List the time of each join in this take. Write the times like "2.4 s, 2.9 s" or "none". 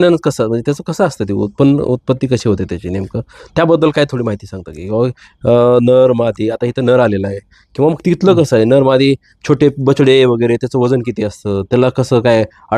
none